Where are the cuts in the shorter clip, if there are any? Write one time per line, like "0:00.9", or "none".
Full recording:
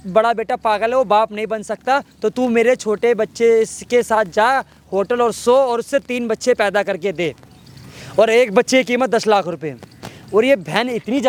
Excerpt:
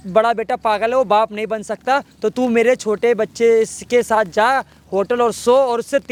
none